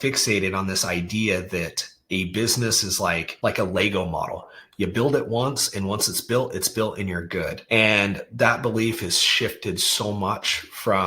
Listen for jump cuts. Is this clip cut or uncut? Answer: cut